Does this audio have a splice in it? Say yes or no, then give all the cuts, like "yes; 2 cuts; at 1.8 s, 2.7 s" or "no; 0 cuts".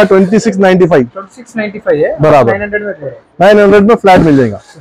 no; 0 cuts